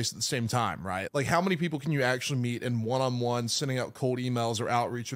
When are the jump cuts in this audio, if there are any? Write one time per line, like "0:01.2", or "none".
0:01.0